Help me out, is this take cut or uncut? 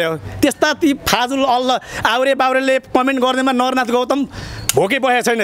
uncut